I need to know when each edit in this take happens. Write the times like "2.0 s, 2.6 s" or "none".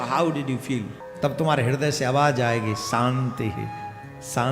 1.0 s